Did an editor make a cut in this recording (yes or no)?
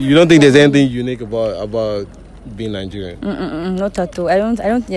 no